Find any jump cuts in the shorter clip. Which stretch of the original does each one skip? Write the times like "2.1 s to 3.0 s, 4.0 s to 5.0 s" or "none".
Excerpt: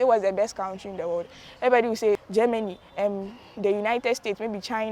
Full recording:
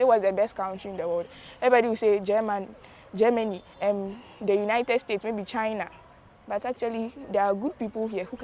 2.2 s to 3.1 s